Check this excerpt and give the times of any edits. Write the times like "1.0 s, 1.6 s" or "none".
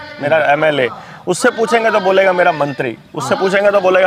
none